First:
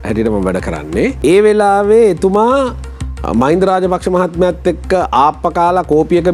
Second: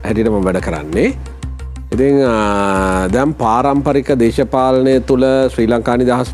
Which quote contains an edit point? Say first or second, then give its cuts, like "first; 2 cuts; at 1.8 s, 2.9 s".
first; 1 cut; at 1.2 s